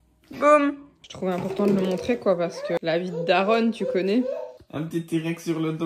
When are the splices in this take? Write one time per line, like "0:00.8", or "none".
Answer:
0:00.9
0:04.6